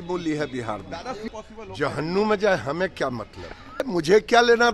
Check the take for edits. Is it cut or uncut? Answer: cut